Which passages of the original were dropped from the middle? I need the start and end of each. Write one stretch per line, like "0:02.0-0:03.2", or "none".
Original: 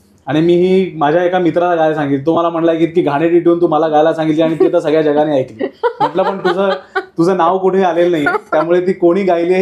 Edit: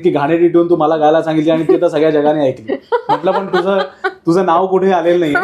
none

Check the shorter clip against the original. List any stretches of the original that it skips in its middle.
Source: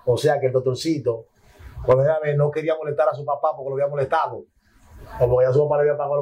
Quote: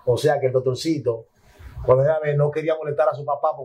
none

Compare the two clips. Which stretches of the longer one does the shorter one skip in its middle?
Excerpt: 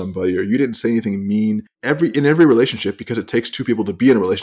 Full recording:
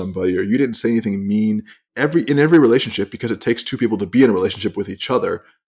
0:01.7-0:01.8

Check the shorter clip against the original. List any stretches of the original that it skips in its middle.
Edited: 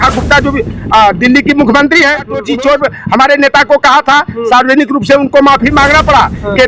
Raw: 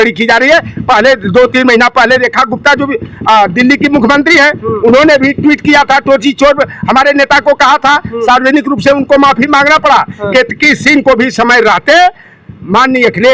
0:04.8-0:06.2

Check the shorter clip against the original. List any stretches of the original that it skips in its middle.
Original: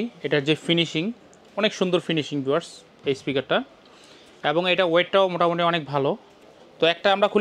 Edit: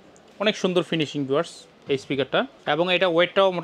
0:03.7-0:04.3

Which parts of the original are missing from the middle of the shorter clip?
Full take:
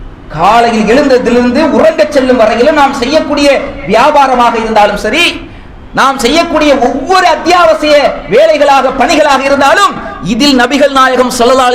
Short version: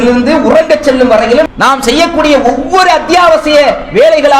0:02.8-0:05.8

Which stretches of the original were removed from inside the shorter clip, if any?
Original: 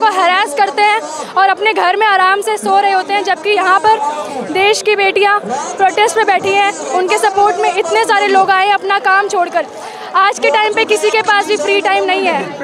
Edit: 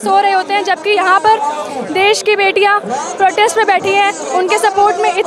none

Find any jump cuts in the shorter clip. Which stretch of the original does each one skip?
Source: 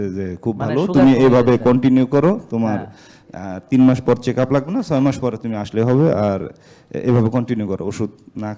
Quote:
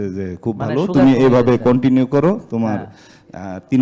none

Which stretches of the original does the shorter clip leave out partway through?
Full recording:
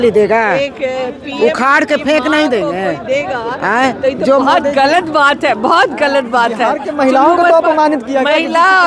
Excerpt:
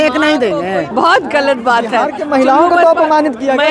0:03.0-0:05.6

